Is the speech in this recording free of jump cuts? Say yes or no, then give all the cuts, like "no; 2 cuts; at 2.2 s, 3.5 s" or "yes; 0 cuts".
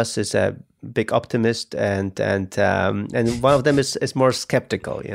yes; 0 cuts